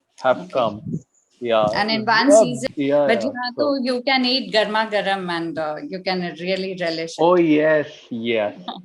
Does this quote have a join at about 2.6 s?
yes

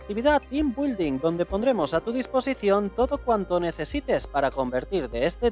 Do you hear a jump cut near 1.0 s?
yes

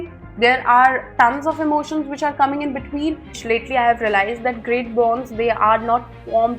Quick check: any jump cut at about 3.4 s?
yes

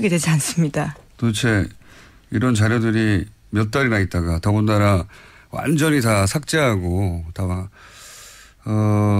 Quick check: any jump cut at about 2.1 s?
yes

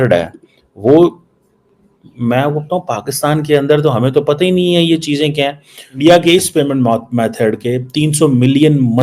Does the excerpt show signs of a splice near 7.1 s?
no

